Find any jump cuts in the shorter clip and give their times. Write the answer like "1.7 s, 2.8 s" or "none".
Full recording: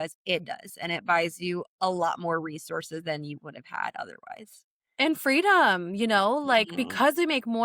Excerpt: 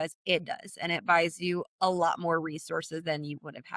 none